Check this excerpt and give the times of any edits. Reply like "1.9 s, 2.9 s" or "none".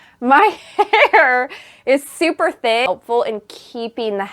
2.8 s